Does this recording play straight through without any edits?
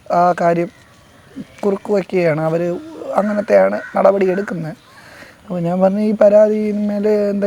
yes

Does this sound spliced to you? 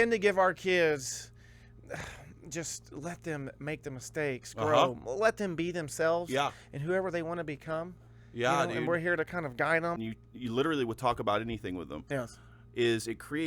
yes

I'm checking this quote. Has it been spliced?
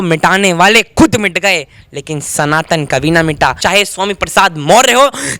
yes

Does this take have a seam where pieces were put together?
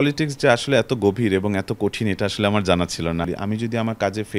yes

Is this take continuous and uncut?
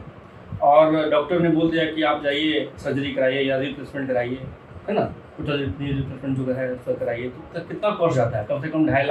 yes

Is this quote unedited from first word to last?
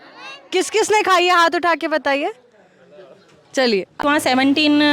no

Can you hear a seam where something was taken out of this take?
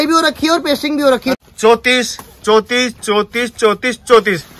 yes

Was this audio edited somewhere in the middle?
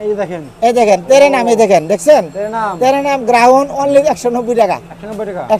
no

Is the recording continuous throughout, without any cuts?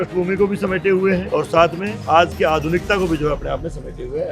no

